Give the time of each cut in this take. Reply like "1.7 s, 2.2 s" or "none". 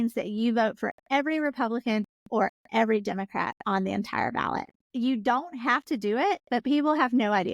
4.8 s